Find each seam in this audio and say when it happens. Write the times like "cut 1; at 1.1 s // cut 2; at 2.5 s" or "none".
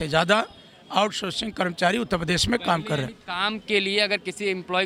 none